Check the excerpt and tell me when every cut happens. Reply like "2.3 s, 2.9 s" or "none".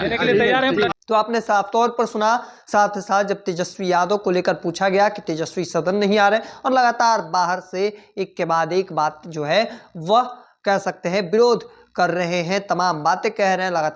none